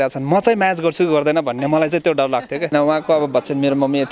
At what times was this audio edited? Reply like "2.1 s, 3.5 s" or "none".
2.7 s